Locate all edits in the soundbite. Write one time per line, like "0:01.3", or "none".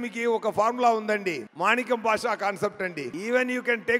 0:01.5
0:03.1

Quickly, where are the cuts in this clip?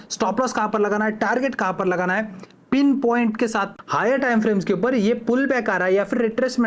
0:03.7

